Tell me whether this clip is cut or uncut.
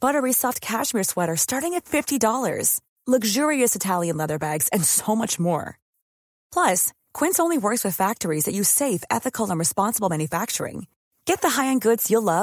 uncut